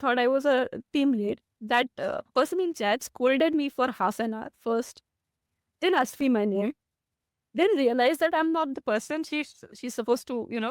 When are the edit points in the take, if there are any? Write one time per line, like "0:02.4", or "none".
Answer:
0:01.5